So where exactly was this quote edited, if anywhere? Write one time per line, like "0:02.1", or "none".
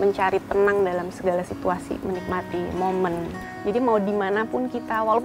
0:03.4